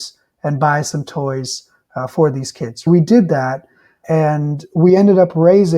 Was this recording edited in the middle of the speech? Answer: yes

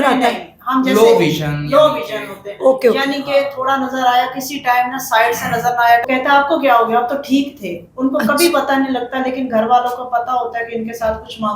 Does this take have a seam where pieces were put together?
yes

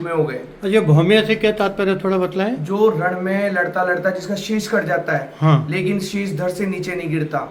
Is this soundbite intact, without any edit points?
yes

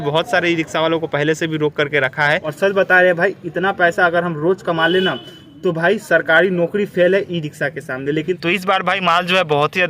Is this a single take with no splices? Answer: no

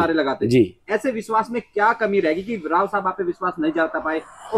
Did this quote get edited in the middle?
no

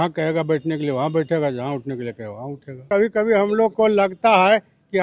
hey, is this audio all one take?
no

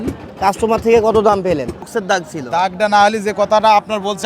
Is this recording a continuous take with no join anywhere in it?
no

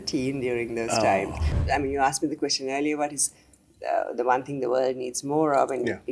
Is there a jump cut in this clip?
yes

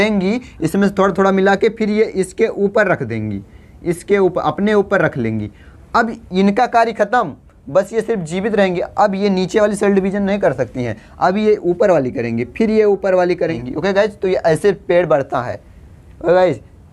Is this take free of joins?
no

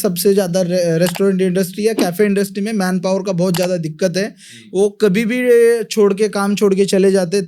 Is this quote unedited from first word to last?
yes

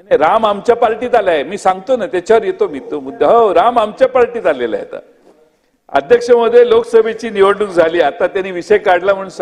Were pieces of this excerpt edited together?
no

